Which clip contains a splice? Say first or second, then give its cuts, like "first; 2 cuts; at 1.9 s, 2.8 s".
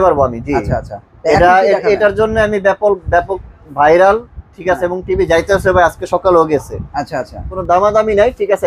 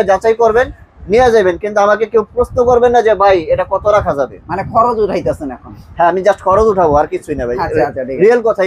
first; 1 cut; at 7.3 s